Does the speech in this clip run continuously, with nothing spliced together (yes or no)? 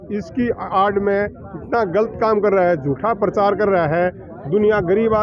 yes